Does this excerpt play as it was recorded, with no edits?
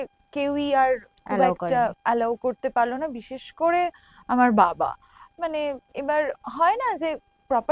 yes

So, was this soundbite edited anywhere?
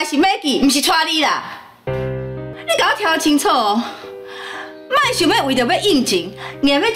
yes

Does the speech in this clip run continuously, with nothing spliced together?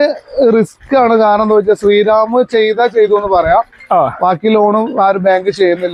yes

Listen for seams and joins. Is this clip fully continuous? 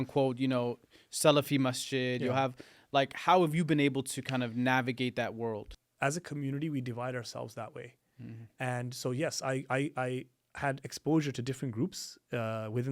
no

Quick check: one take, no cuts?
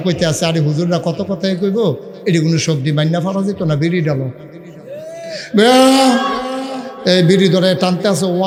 yes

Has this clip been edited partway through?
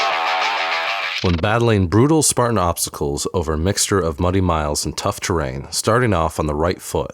yes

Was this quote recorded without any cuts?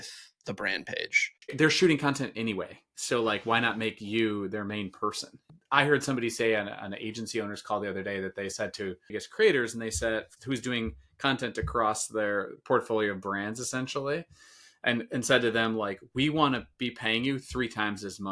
no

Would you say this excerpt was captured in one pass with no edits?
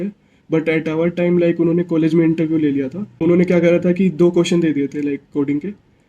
no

